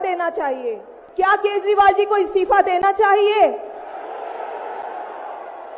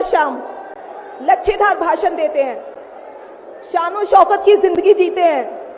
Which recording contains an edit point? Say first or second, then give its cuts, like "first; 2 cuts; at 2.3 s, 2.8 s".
first; 1 cut; at 0.9 s